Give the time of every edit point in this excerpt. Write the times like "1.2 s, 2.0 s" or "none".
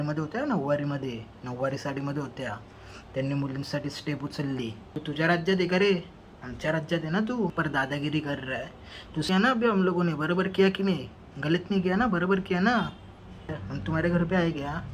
4.9 s, 7.5 s, 9.3 s, 13.6 s

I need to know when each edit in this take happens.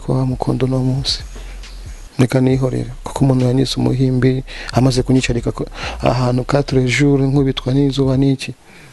none

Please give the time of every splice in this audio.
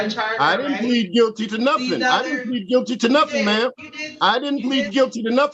none

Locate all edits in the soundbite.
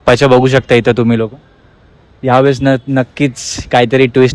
none

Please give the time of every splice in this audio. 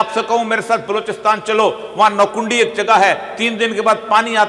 none

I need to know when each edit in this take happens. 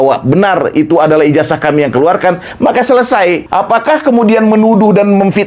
3.4 s

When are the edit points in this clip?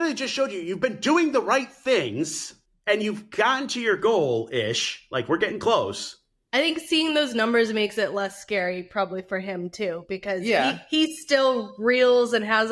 2.9 s

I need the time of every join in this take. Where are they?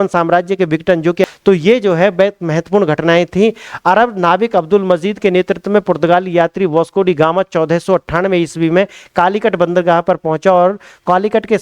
1.2 s

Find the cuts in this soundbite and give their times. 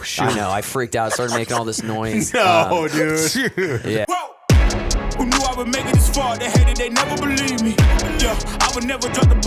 4.1 s

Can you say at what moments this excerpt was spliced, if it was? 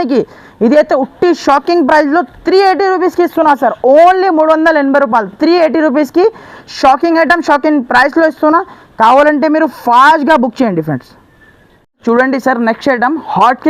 none

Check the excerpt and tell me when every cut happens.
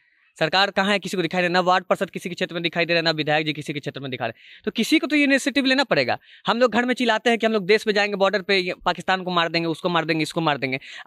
none

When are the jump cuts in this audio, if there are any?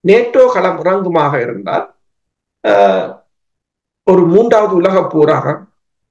none

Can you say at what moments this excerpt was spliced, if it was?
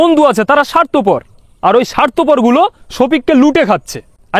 none

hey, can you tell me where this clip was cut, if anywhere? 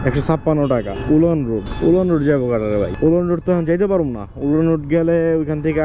0.9 s, 1.7 s, 2.9 s

